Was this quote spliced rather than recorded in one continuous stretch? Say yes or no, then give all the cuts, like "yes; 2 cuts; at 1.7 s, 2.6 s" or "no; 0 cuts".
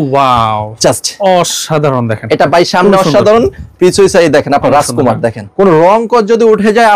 yes; 1 cut; at 5.4 s